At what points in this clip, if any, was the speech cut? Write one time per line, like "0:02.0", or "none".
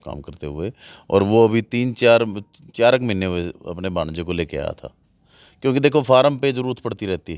none